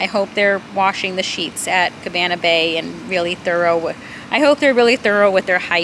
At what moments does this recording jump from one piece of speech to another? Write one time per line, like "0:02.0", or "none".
none